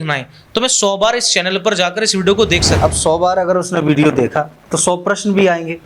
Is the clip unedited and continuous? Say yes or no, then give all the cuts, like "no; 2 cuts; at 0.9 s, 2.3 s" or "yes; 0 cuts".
no; 1 cut; at 2.8 s